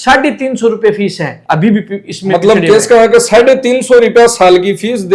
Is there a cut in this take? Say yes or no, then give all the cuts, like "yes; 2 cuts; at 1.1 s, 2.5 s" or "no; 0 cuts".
yes; 1 cut; at 1.4 s